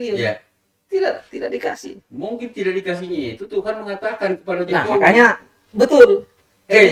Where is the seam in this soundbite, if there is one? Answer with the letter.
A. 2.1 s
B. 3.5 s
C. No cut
C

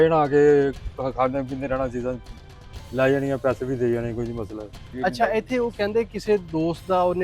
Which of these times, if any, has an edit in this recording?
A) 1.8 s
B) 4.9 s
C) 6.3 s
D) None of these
B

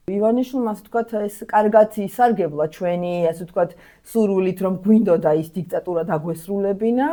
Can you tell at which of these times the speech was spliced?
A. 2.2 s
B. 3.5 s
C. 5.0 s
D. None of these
D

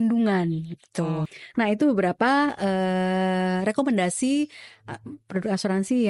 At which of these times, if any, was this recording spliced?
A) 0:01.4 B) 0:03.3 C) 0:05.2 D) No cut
A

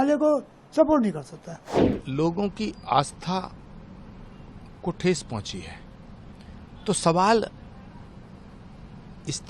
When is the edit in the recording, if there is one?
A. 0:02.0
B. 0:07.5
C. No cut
A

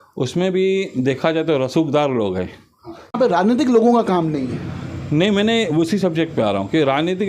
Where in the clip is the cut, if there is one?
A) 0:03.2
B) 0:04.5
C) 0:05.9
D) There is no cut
A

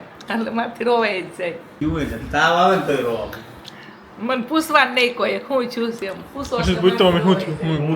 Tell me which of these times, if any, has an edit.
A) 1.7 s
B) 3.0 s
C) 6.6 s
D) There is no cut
A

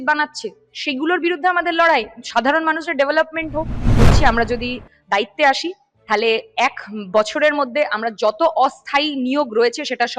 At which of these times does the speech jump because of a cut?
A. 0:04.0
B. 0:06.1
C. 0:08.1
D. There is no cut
A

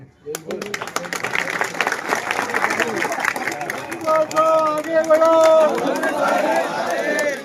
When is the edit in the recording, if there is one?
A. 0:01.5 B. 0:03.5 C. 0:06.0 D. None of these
D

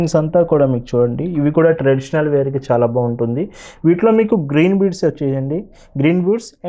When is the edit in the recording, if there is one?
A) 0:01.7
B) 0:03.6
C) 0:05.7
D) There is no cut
D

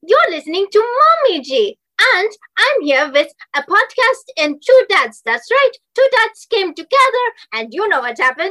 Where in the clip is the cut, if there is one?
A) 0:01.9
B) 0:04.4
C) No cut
A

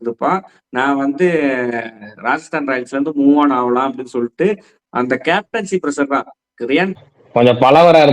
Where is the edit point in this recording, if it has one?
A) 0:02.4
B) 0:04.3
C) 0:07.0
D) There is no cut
C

